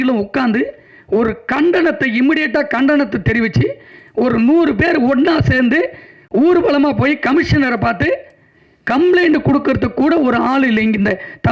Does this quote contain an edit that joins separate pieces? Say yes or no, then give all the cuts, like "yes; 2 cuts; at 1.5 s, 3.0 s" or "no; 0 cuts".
no; 0 cuts